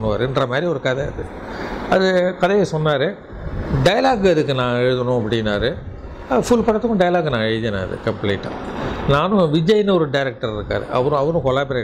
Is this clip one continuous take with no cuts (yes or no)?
yes